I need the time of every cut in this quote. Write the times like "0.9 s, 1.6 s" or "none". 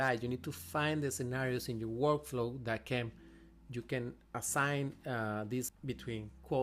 5.7 s